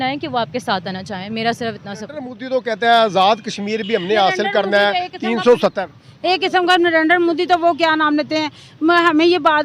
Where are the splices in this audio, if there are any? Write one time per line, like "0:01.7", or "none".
0:02.4